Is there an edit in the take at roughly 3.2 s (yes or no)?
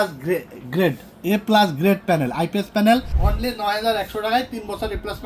yes